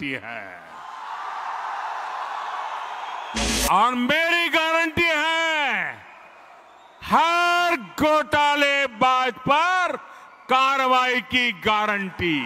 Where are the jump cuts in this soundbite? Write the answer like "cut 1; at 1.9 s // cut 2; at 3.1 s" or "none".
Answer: cut 1; at 3.4 s